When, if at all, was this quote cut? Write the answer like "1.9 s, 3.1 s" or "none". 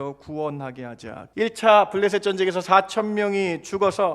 1.2 s